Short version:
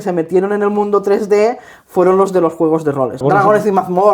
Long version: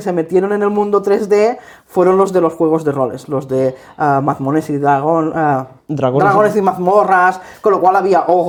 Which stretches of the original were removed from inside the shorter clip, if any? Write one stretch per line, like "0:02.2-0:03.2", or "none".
0:03.2-0:06.1